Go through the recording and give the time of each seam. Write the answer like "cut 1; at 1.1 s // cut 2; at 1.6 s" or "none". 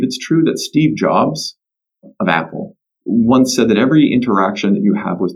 cut 1; at 2.1 s